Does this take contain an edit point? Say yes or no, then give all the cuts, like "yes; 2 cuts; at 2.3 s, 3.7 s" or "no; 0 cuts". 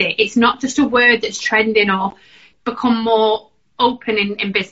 yes; 1 cut; at 2.4 s